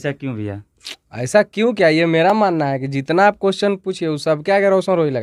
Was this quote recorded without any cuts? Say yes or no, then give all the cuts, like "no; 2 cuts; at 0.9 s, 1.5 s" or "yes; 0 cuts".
yes; 0 cuts